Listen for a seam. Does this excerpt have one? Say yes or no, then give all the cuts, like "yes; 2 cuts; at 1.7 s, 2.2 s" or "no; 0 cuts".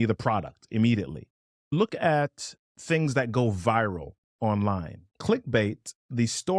yes; 2 cuts; at 1.7 s, 5.0 s